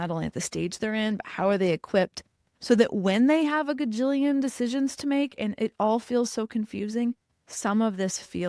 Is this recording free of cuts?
yes; 0 cuts

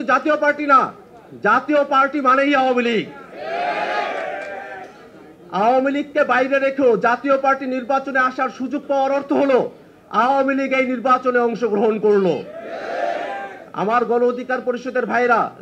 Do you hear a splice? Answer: no; 0 cuts

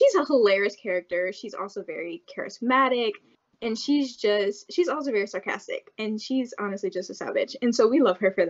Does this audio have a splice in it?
yes; 1 cut; at 7.6 s

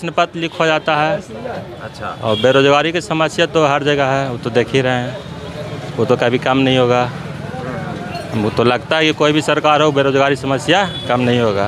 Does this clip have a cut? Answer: no; 0 cuts

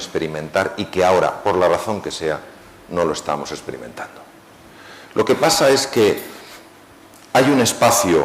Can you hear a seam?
yes; 1 cut; at 1.2 s

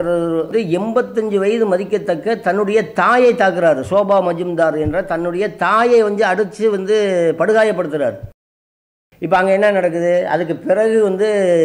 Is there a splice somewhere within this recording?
yes; 1 cut; at 8.8 s

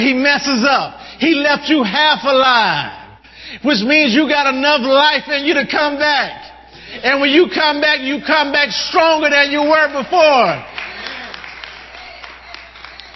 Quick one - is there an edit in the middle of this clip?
no; 0 cuts

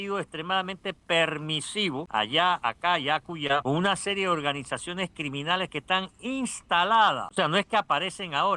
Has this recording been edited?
yes; 3 cuts; at 2.1 s, 3.6 s, 7.3 s

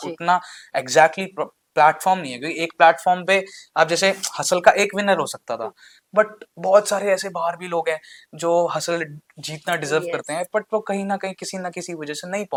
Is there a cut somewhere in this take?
no; 0 cuts

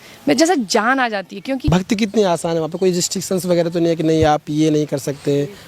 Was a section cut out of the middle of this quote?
yes; 1 cut; at 1.6 s

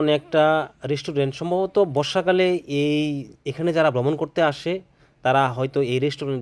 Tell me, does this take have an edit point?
no; 0 cuts

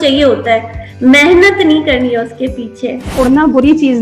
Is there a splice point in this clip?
yes; 1 cut; at 3.1 s

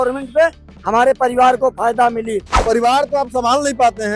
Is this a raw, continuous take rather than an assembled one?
no; 1 cut; at 2.5 s

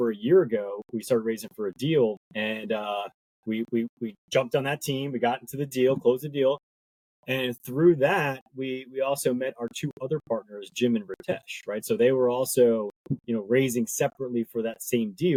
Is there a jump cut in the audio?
no; 0 cuts

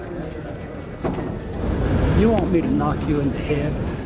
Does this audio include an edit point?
yes; 1 cut; at 1.6 s

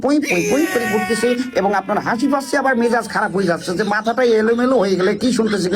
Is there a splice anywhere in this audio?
no; 0 cuts

